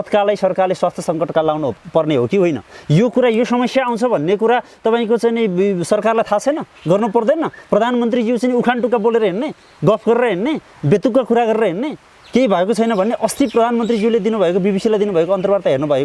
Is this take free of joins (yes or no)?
yes